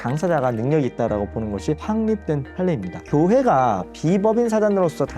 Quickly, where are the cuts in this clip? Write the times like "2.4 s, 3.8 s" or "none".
3.0 s